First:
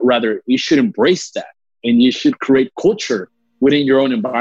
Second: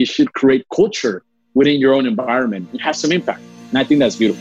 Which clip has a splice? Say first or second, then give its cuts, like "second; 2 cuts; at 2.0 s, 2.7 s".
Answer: second; 1 cut; at 3.5 s